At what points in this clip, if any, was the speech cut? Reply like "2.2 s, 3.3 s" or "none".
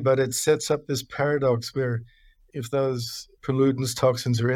2.4 s, 3.2 s